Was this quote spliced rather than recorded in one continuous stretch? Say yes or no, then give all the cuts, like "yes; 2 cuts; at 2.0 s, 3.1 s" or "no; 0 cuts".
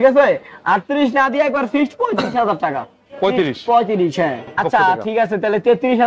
yes; 1 cut; at 4.6 s